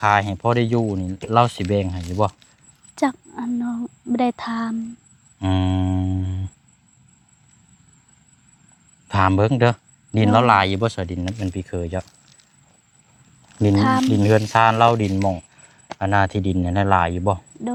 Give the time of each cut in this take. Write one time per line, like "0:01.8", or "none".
none